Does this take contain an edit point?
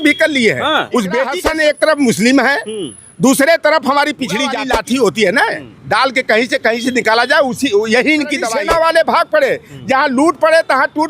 yes; 3 cuts; at 1.4 s, 4.6 s, 8.5 s

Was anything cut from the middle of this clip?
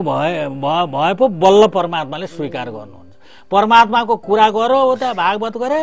no; 0 cuts

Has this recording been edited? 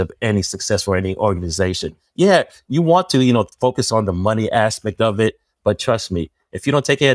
no; 0 cuts

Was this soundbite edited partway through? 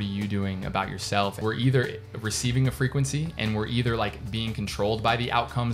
yes; 1 cut; at 1.4 s

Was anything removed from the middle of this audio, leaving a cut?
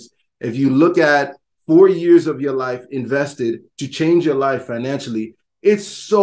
no; 0 cuts

